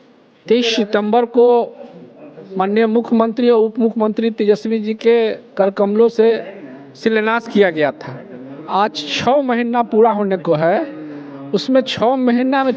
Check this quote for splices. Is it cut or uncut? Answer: uncut